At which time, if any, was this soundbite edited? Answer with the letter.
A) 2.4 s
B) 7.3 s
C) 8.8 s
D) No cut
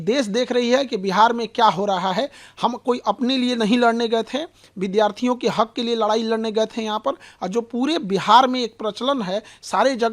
D